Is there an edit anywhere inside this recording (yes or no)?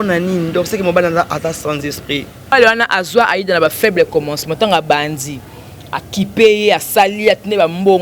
yes